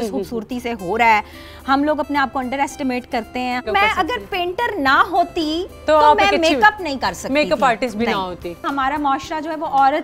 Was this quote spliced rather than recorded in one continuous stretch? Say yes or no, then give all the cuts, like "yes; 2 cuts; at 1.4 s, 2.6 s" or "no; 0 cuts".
yes; 2 cuts; at 3.6 s, 8.6 s